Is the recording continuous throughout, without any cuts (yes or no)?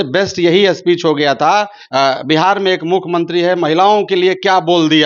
no